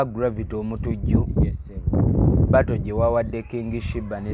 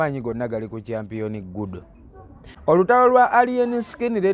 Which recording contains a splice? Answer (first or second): second